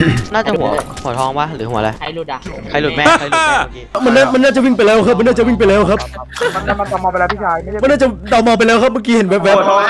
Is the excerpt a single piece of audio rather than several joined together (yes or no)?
no